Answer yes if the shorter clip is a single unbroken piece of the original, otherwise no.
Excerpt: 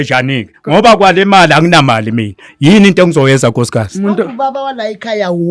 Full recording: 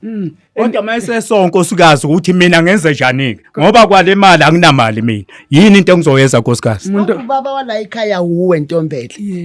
yes